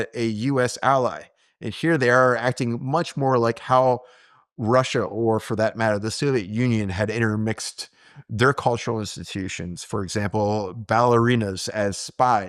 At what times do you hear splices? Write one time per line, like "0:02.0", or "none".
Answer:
none